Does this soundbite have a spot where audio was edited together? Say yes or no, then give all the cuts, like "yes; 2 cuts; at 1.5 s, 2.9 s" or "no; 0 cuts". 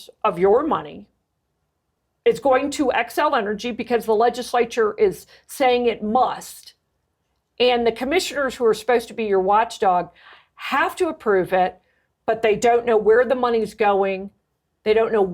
yes; 1 cut; at 1.9 s